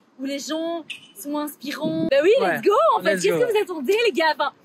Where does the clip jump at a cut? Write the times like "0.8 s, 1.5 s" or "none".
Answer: 2.1 s